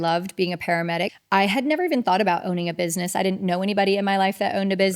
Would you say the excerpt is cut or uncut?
cut